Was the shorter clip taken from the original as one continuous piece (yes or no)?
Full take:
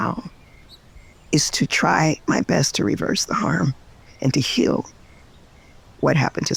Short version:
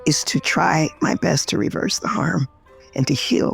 yes